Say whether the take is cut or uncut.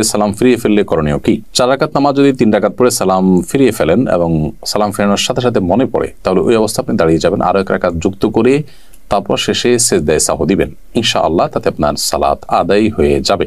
uncut